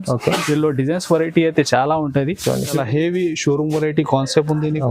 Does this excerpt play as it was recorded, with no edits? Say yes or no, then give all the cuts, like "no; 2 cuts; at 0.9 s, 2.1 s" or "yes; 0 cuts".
no; 1 cut; at 2.7 s